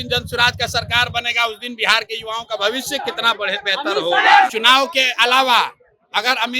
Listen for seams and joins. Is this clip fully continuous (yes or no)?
no